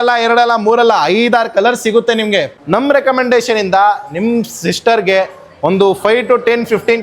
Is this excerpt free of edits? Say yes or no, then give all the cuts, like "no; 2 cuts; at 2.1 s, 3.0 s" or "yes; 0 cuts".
no; 1 cut; at 2.5 s